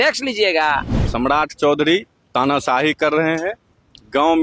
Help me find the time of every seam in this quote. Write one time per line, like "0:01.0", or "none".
0:01.0